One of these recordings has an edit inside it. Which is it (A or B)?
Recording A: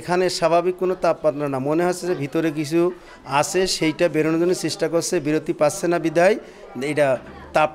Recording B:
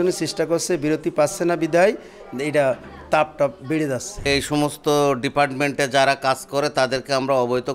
B